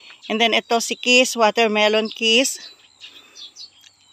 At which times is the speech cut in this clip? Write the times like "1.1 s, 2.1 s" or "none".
none